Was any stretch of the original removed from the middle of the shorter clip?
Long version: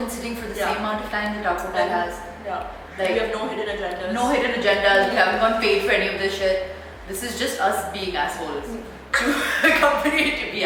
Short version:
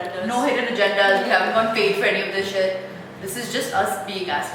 no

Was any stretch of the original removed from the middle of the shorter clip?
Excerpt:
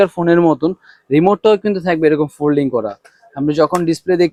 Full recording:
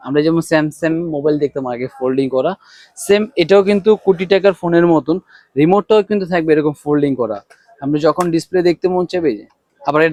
no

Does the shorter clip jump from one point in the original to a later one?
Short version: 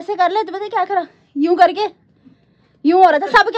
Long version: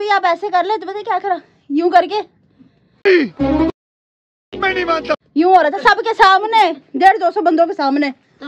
yes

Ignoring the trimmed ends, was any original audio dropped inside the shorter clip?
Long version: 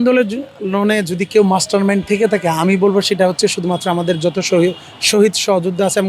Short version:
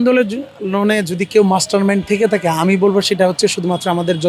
no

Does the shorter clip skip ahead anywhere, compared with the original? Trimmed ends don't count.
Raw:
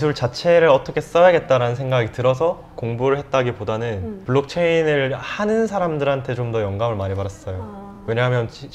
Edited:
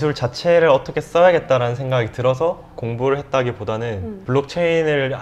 no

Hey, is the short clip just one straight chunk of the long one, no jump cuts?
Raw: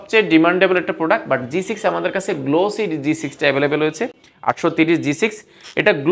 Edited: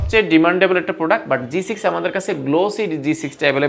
yes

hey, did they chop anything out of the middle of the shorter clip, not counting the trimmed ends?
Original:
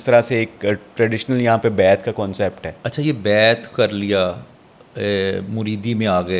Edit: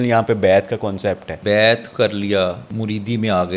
yes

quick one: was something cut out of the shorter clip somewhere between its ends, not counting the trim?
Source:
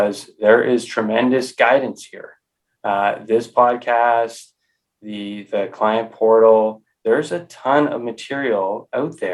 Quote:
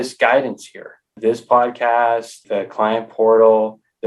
yes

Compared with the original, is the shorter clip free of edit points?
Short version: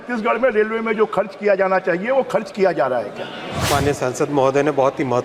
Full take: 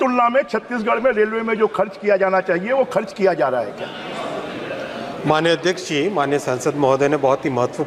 no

